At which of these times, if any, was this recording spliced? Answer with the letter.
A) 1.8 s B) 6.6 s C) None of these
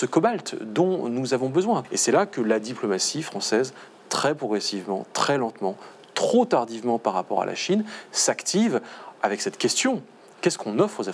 A